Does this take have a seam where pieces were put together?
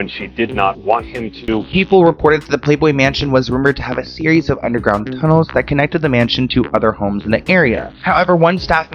yes; 1 cut; at 1.7 s

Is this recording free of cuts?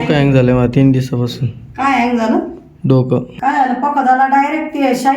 no; 1 cut; at 3.3 s

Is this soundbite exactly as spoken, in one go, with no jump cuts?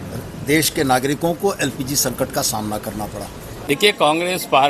no; 1 cut; at 3.5 s

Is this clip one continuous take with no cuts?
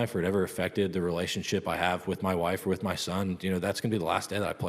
yes; 0 cuts

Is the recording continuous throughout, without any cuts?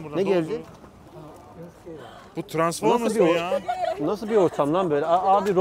yes; 0 cuts

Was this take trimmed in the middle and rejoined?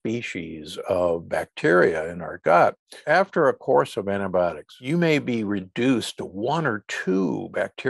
yes; 2 cuts; at 3.0 s, 4.7 s

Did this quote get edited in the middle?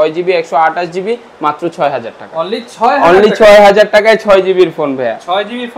no; 0 cuts

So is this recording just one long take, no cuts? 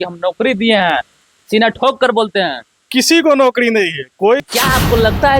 no; 1 cut; at 4.4 s

